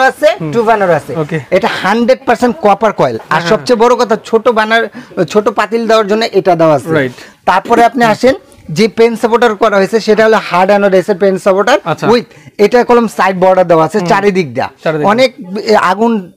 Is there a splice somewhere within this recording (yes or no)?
no